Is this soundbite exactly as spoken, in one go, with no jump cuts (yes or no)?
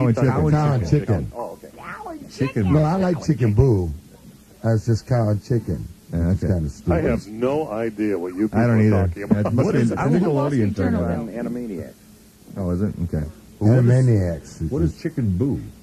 yes